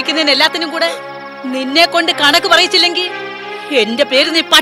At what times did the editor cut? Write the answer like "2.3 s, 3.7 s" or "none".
none